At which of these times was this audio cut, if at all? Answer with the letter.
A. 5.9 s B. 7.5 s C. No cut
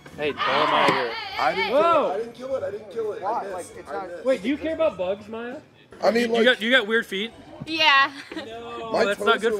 A